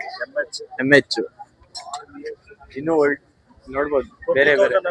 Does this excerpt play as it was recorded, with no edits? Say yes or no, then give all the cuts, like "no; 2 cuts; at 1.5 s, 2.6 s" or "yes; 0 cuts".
yes; 0 cuts